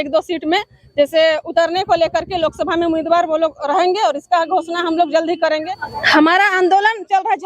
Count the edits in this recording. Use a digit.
1